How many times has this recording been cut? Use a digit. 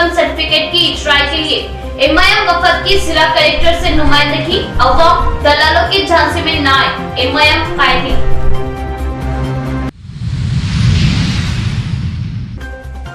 0